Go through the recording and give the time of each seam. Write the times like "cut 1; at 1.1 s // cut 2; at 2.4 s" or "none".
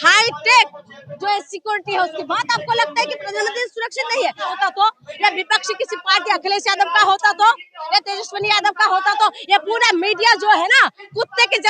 cut 1; at 4.5 s